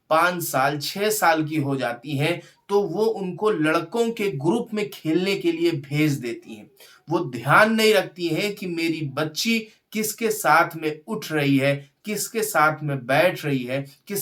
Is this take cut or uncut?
uncut